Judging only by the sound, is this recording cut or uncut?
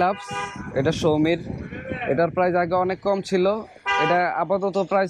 uncut